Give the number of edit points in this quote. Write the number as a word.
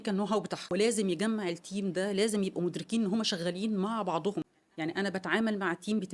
two